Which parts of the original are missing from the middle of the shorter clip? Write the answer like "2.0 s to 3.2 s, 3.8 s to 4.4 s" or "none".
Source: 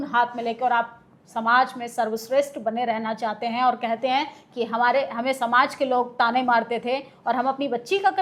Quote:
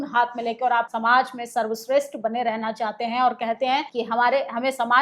0.9 s to 1.3 s, 4.3 s to 4.5 s